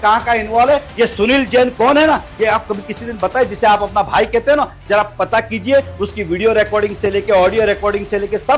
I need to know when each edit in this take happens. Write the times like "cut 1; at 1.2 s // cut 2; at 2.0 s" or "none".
none